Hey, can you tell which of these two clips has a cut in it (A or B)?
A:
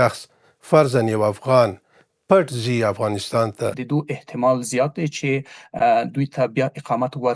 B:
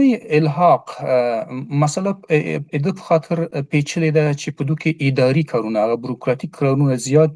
A